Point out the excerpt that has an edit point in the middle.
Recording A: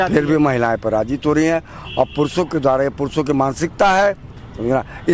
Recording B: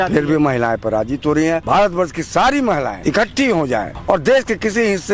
B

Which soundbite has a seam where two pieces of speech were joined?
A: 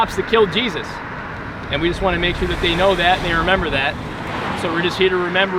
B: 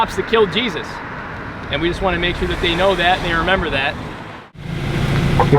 B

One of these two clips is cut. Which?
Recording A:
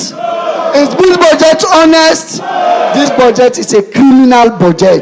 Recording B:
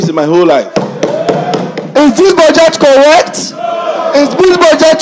B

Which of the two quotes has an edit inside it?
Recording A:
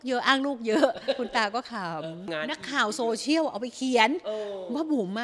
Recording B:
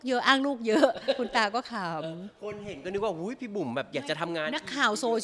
A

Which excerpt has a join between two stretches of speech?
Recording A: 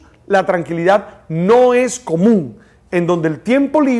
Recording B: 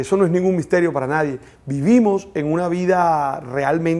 B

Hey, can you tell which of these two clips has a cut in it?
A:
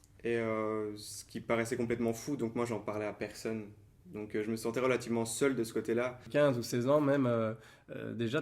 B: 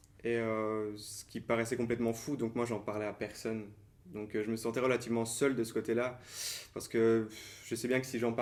A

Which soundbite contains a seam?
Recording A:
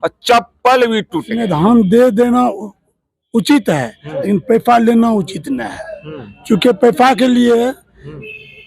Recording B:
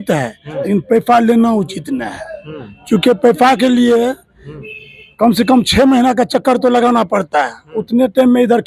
A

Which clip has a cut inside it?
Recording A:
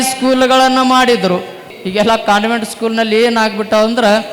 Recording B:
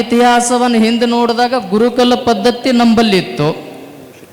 A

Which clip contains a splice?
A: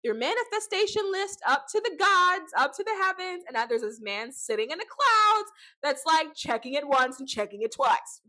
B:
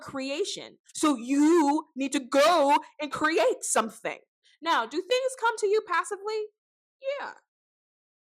B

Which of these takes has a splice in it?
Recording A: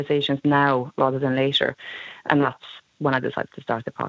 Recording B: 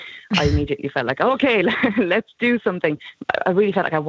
B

